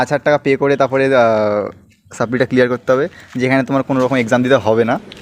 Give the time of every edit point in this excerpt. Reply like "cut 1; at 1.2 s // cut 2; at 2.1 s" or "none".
none

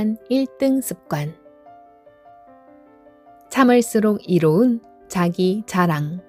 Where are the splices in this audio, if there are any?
none

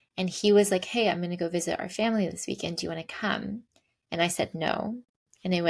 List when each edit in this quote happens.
none

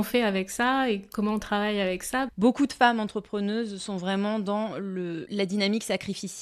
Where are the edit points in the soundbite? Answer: cut 1; at 2.3 s // cut 2; at 5.2 s

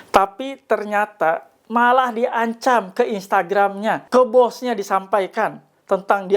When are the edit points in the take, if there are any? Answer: cut 1; at 4.0 s

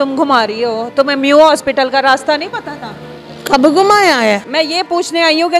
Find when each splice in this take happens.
cut 1; at 4.5 s

